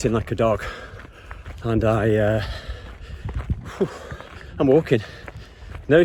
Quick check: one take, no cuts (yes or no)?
yes